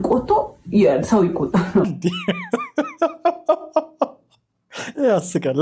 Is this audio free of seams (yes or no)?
no